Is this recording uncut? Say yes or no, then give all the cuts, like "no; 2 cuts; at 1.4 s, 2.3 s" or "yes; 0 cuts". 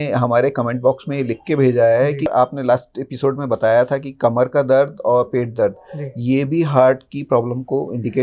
no; 1 cut; at 2.3 s